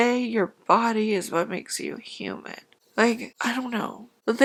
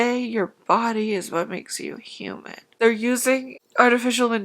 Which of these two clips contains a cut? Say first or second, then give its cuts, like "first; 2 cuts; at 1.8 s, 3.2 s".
second; 1 cut; at 2.6 s